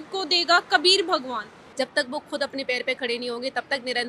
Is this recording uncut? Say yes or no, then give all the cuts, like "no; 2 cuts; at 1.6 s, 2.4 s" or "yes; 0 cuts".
no; 1 cut; at 1.6 s